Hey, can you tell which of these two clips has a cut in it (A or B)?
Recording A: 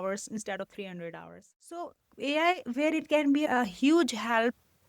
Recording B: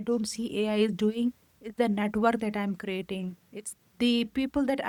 A